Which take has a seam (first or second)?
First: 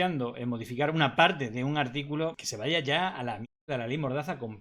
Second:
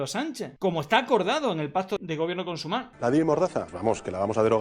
second